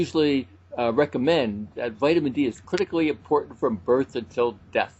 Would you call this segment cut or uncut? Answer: uncut